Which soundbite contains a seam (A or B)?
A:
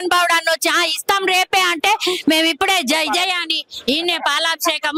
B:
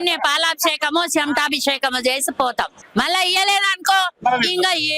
B